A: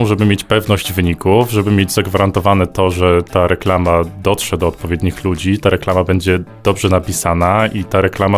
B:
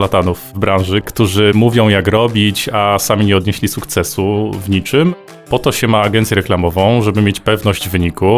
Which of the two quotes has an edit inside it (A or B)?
B